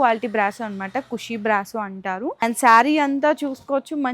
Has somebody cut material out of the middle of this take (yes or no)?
yes